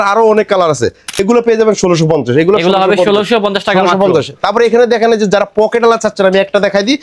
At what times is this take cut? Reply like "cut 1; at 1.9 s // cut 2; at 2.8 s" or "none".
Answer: cut 1; at 1.2 s

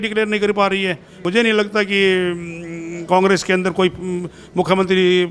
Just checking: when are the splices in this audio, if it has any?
cut 1; at 1.2 s

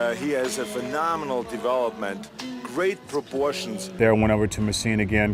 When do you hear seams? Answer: cut 1; at 3.9 s

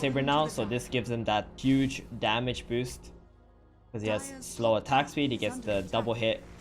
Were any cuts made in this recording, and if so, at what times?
cut 1; at 1.5 s

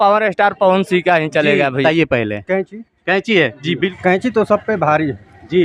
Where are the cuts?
cut 1; at 1.8 s // cut 2; at 3.9 s

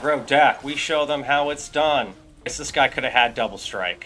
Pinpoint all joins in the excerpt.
cut 1; at 2.6 s

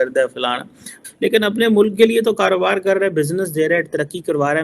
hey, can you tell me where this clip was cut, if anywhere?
cut 1; at 1.0 s

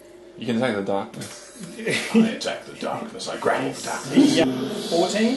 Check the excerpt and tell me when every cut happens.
cut 1; at 4.4 s

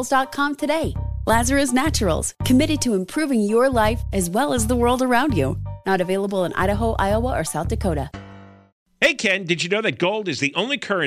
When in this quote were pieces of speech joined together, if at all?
cut 1; at 8.7 s

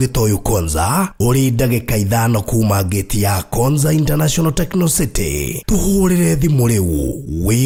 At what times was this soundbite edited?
none

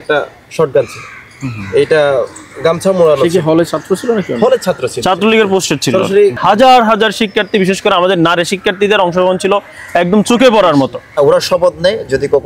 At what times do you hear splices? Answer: cut 1; at 6.4 s // cut 2; at 11.0 s

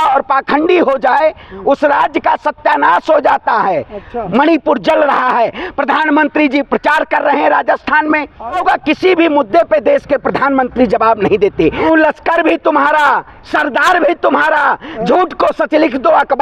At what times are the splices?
cut 1; at 4.1 s // cut 2; at 8.6 s // cut 3; at 11.8 s

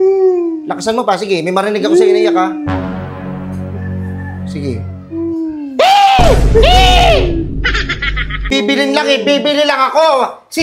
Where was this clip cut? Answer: cut 1; at 8.5 s

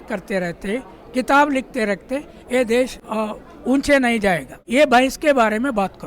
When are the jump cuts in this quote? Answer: cut 1; at 3.0 s // cut 2; at 4.5 s

